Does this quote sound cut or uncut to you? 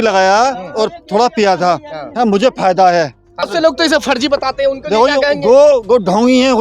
cut